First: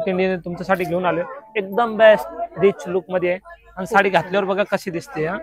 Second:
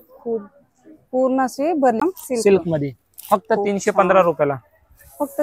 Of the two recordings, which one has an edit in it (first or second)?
second